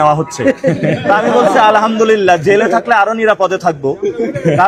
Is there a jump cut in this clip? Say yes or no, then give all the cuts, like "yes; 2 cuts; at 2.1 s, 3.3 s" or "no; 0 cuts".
no; 0 cuts